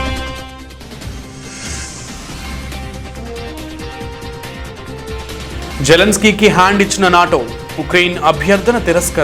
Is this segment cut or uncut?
uncut